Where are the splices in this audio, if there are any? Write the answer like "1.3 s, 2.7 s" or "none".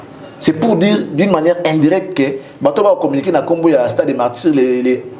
none